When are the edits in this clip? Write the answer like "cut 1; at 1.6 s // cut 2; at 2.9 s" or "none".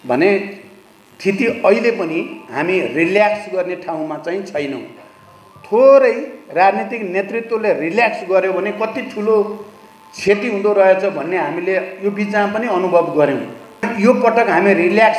cut 1; at 13.9 s